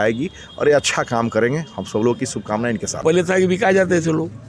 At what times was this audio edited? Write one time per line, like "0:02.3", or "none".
0:03.0